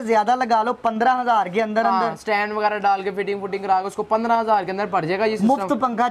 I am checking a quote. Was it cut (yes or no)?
no